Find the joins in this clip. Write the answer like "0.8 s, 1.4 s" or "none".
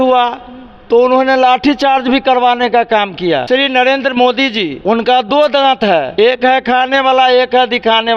3.4 s, 4.8 s, 6.1 s